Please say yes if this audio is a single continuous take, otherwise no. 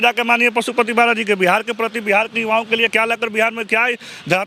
yes